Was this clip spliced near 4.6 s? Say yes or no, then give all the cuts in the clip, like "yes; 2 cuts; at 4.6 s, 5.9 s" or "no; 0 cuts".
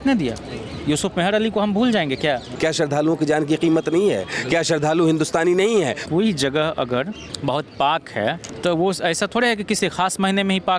no; 4 cuts; at 2.5 s, 6.0 s, 7.2 s, 8.5 s